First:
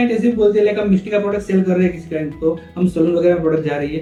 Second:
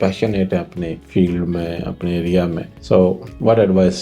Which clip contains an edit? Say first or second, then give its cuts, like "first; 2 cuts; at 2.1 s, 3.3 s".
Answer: second; 2 cuts; at 1.0 s, 2.7 s